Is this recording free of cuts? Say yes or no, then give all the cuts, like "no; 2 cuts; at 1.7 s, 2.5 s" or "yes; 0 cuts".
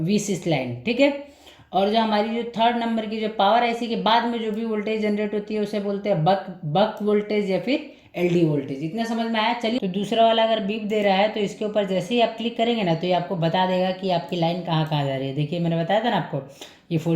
no; 1 cut; at 9.8 s